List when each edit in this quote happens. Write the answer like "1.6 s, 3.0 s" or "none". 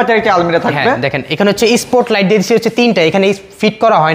none